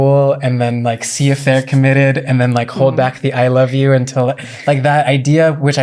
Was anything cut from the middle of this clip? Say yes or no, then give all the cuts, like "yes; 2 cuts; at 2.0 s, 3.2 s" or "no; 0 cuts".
no; 0 cuts